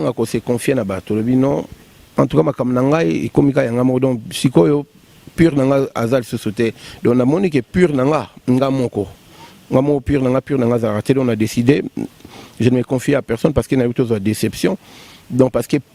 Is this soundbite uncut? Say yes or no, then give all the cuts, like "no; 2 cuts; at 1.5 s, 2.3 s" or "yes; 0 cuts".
yes; 0 cuts